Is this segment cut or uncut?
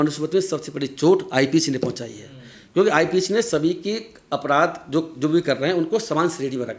uncut